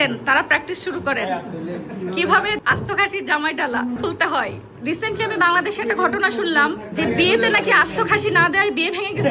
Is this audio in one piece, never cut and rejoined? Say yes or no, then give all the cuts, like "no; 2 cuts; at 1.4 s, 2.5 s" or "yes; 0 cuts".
no; 3 cuts; at 2.6 s, 4.4 s, 6.9 s